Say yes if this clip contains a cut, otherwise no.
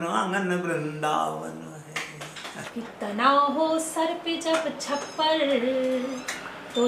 yes